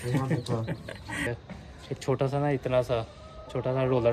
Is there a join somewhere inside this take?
yes; 1 cut; at 1.3 s

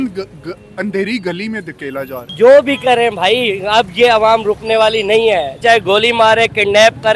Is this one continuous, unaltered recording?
no; 2 cuts; at 2.2 s, 5.6 s

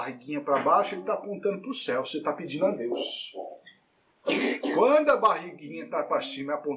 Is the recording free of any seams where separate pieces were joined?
yes; 0 cuts

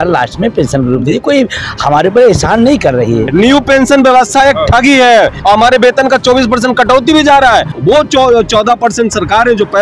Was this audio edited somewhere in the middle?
yes; 3 cuts; at 3.3 s, 5.4 s, 7.7 s

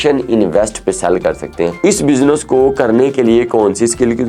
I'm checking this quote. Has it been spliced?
yes; 1 cut; at 1.7 s

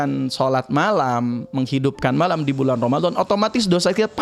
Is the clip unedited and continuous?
yes; 0 cuts

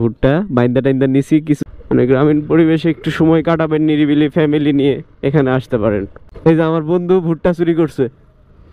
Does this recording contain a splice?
yes; 2 cuts; at 1.6 s, 6.2 s

